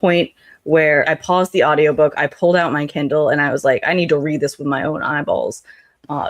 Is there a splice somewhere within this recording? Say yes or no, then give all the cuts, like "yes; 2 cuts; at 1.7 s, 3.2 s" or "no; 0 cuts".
yes; 1 cut; at 1.1 s